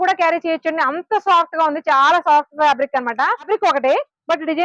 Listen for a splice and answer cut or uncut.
cut